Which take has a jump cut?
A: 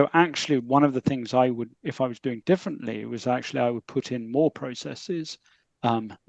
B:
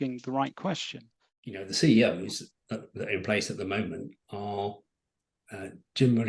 B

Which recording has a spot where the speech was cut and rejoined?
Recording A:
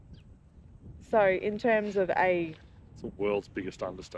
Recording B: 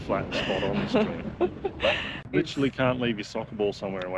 B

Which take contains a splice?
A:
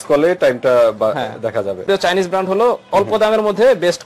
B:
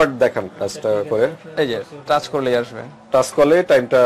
A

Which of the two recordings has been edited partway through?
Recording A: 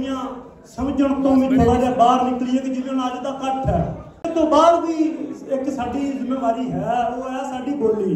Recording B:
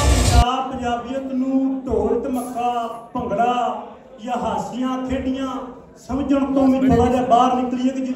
A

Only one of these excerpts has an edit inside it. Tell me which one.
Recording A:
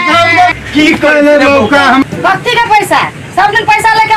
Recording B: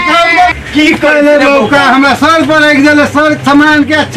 A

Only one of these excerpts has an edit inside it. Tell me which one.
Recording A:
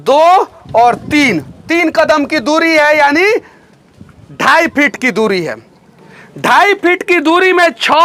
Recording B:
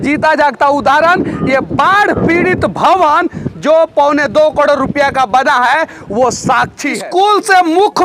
B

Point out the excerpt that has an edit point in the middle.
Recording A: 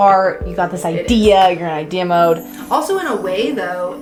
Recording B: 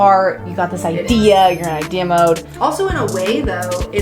B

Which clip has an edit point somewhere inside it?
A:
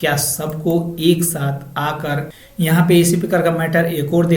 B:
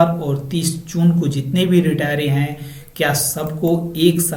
A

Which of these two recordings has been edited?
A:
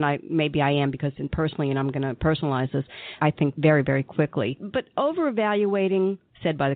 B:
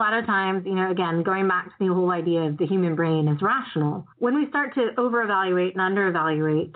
A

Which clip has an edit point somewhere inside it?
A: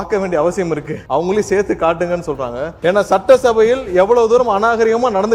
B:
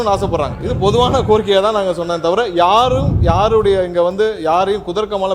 A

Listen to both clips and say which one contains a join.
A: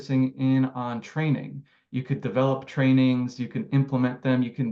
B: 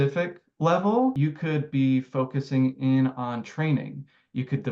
B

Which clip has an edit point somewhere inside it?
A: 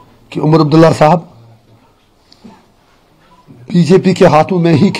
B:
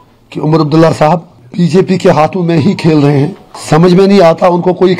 B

